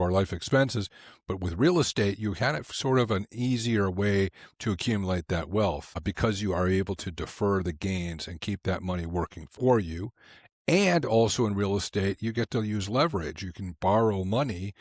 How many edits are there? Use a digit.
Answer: 1